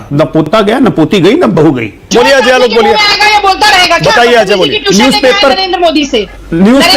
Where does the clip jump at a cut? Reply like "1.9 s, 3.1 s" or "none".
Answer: 2.1 s

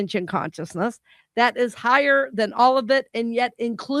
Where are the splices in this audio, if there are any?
none

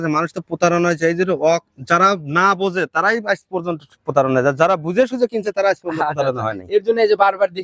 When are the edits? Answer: none

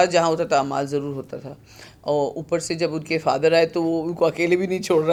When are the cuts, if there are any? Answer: none

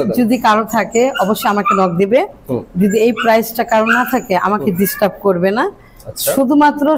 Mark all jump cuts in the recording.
none

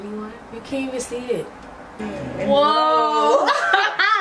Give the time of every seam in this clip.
2.0 s

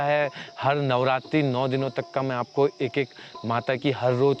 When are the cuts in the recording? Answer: none

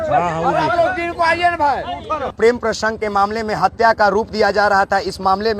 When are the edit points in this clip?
2.3 s

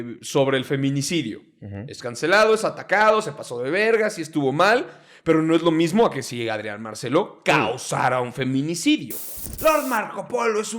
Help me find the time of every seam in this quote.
9.1 s

